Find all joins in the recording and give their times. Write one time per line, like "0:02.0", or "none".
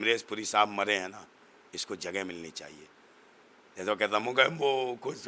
none